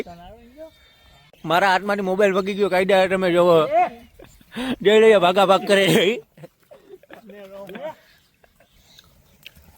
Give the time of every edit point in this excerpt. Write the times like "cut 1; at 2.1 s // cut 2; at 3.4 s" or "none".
cut 1; at 1.4 s

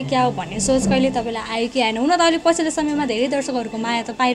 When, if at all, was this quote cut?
none

